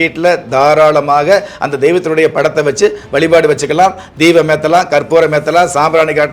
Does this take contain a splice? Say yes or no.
no